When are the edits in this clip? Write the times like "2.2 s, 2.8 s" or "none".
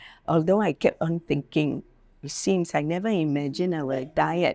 none

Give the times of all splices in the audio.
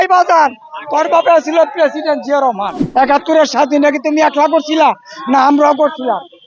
2.7 s

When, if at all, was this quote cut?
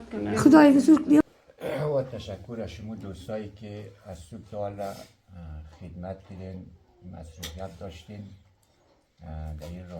1.2 s

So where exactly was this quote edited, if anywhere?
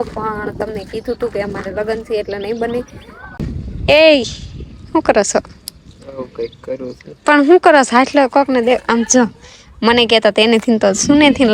3.3 s

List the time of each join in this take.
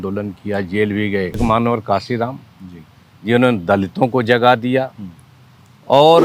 1.4 s

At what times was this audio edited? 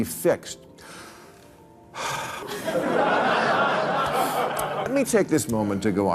2.4 s, 4.9 s

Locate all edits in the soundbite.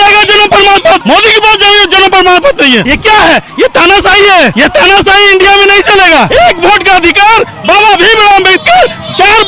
1.0 s, 2.9 s, 4.5 s, 6.3 s

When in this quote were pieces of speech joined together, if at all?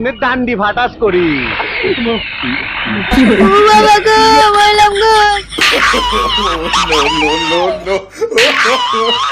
3.1 s

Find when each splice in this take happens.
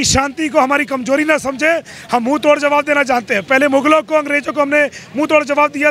none

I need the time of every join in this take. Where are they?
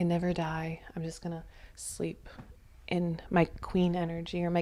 none

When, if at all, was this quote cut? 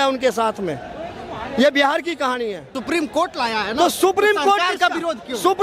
2.8 s

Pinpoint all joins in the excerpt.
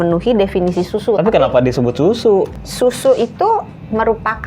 2.5 s

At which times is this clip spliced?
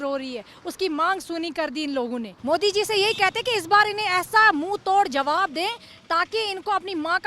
2.3 s

